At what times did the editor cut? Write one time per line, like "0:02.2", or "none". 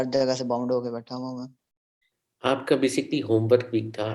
none